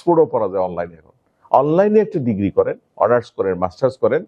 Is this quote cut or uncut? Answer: uncut